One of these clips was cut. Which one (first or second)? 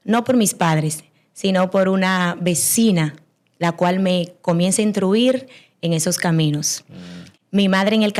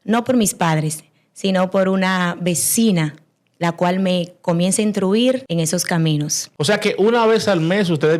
second